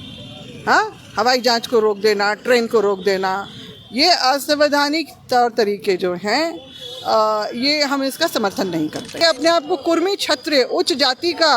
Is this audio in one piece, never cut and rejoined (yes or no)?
no